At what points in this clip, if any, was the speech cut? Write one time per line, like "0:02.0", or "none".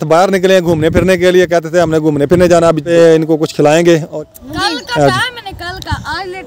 0:02.9
0:04.1